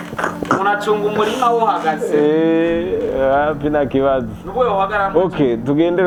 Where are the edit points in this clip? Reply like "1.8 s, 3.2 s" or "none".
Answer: none

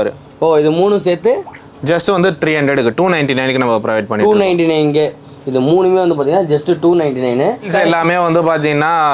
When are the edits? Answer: 7.7 s

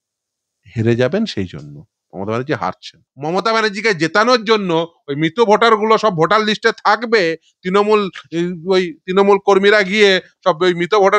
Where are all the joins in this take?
3.0 s

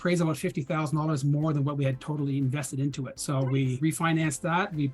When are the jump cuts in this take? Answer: 3.5 s

